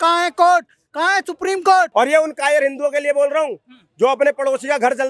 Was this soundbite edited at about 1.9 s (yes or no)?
yes